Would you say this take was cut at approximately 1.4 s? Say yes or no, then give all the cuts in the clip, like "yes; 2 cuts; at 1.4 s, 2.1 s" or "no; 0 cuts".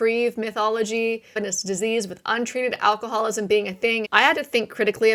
yes; 2 cuts; at 1.4 s, 4.0 s